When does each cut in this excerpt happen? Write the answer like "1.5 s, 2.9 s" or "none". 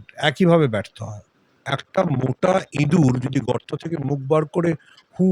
1.6 s